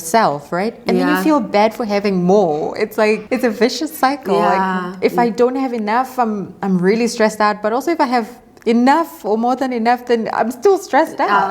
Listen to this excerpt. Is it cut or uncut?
uncut